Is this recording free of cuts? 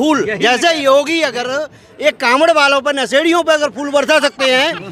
yes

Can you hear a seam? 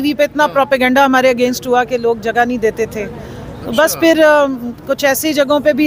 no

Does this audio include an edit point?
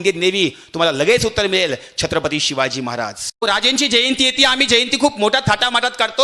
yes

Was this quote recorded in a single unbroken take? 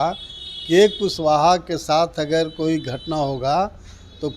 yes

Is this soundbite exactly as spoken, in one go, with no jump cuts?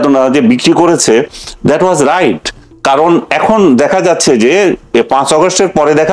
yes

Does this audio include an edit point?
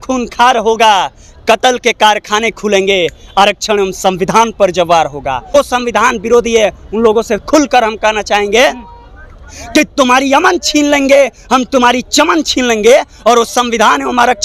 yes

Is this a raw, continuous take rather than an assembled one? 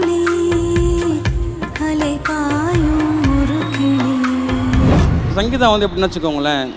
no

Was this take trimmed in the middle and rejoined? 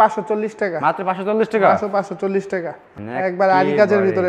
yes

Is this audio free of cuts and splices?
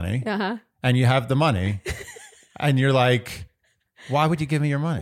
yes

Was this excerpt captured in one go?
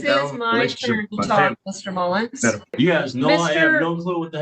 no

